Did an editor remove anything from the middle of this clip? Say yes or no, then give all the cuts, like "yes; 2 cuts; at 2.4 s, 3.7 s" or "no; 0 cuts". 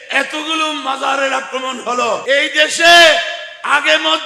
yes; 1 cut; at 2.2 s